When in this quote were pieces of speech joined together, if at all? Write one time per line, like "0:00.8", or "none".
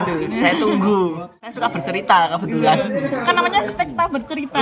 0:01.5